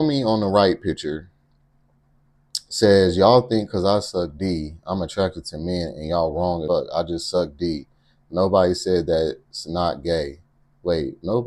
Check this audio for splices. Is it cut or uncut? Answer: cut